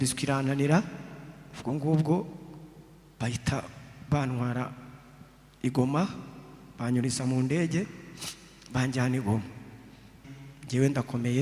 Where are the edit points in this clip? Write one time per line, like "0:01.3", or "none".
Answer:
0:10.3